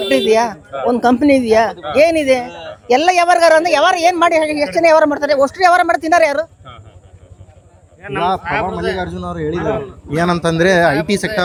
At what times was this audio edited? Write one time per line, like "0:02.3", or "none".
none